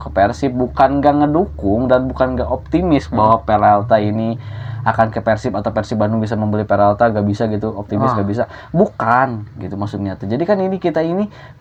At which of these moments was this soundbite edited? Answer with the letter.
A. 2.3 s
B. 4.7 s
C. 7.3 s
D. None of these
D